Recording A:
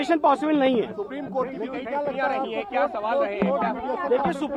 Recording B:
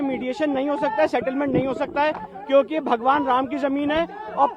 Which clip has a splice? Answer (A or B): B